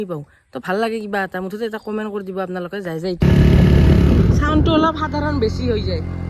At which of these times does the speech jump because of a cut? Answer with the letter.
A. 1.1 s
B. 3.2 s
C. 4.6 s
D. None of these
B